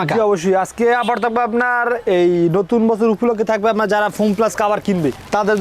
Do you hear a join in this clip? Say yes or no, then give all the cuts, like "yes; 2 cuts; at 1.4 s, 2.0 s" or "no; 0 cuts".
no; 0 cuts